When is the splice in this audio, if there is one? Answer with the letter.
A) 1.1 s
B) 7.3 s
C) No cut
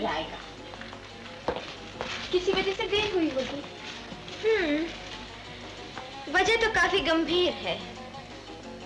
C